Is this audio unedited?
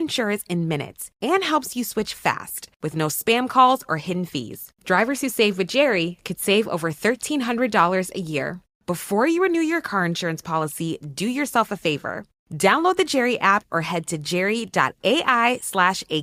yes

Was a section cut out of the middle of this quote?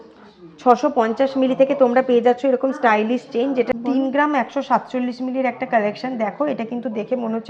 yes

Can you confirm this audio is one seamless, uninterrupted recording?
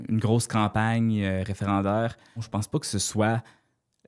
no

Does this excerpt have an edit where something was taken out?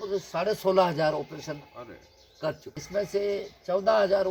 yes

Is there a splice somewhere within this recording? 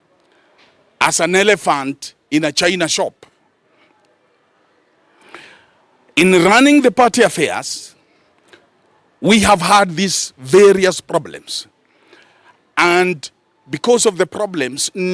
no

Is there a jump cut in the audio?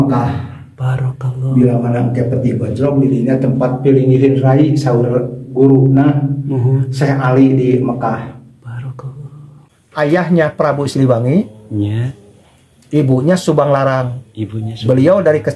yes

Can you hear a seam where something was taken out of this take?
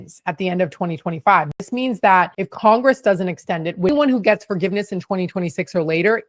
yes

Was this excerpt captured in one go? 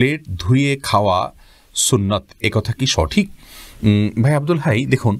yes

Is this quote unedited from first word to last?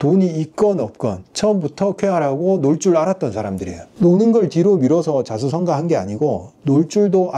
yes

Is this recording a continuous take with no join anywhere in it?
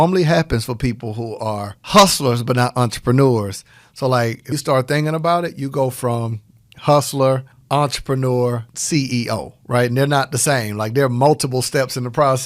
no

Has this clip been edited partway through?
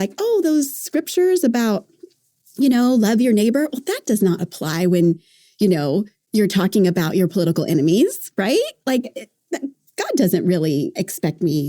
no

